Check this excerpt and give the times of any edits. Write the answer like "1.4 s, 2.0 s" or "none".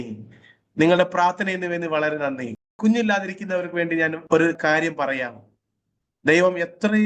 2.7 s, 4.5 s